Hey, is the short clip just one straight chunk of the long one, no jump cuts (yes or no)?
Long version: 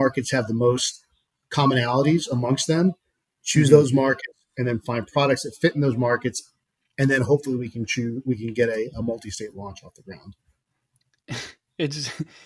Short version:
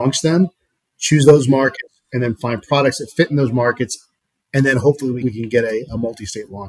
no